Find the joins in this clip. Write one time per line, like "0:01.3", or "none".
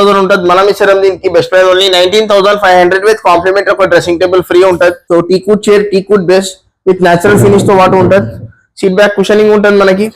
0:05.0